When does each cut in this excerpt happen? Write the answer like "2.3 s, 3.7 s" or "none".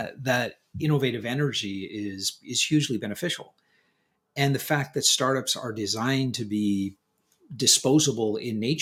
none